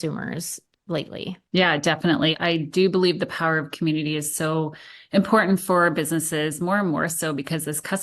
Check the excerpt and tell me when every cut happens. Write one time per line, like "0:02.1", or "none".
0:01.4
0:02.4